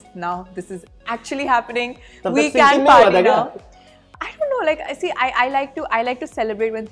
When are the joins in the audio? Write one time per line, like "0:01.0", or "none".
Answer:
none